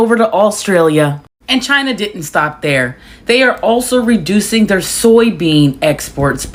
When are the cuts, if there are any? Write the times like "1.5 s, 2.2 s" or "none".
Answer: none